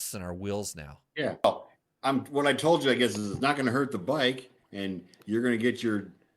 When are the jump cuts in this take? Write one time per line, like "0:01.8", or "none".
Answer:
0:01.4